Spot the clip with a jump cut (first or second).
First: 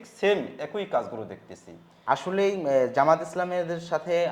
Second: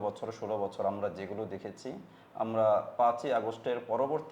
first